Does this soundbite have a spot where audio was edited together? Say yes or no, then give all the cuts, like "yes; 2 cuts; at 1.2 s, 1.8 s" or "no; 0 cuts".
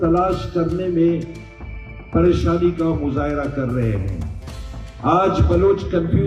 no; 0 cuts